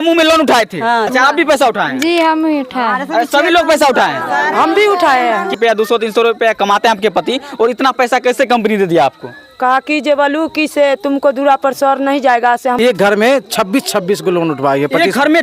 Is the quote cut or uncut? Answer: cut